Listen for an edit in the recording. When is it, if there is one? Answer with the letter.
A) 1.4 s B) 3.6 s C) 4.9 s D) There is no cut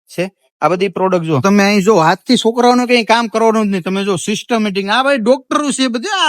A